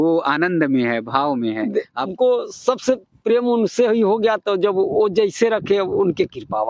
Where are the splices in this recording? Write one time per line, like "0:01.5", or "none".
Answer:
0:02.1